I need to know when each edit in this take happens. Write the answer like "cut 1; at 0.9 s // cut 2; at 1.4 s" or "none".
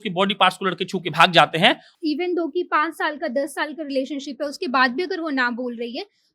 cut 1; at 1.9 s